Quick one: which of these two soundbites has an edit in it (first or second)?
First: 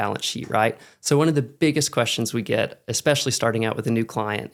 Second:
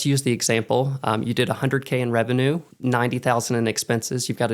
second